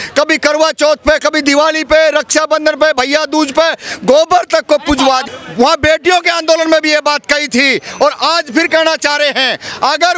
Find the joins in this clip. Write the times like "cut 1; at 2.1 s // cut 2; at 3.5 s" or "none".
cut 1; at 5.2 s